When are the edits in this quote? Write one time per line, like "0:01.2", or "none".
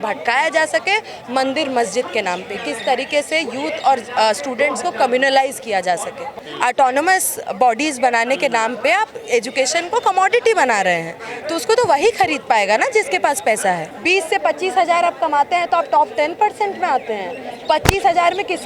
0:06.3
0:13.9